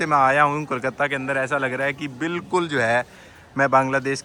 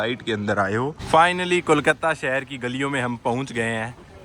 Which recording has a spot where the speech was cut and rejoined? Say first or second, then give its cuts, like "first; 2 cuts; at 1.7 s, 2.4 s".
second; 1 cut; at 1.0 s